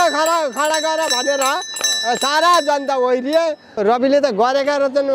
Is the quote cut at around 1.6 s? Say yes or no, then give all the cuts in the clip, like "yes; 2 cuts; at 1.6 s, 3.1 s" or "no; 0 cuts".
no; 1 cut; at 3.8 s